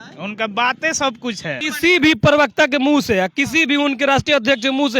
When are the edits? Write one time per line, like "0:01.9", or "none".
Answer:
0:01.7